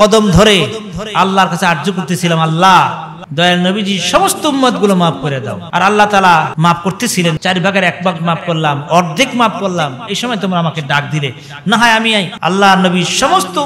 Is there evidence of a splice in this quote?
no; 0 cuts

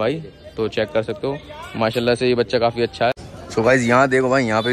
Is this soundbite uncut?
no; 1 cut; at 3.5 s

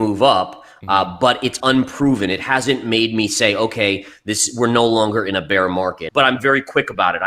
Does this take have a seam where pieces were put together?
yes; 1 cut; at 6.0 s

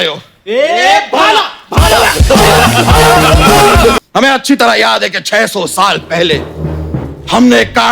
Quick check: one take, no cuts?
no; 1 cut; at 4.0 s

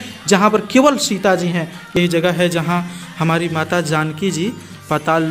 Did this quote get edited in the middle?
yes; 1 cut; at 1.9 s

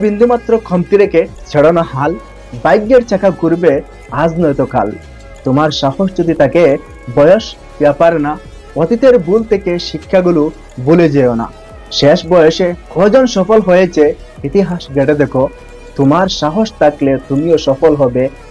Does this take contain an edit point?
no; 0 cuts

